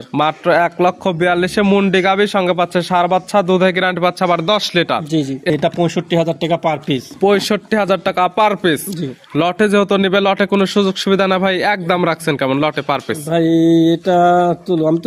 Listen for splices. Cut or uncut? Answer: cut